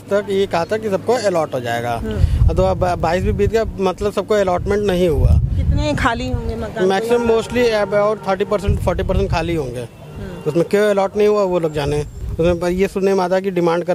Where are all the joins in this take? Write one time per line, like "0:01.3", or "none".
none